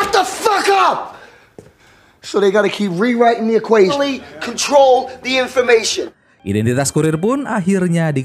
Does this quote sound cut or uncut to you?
uncut